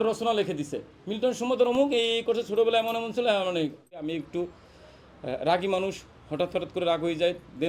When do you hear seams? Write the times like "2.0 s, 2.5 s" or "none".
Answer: 4.1 s